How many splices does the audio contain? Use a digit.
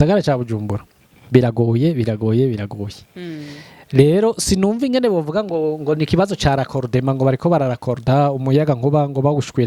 0